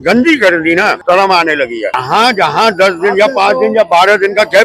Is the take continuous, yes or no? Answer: no